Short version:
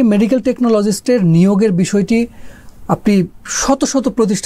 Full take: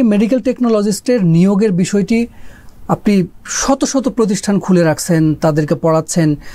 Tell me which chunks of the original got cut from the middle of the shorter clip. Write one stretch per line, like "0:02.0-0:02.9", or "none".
none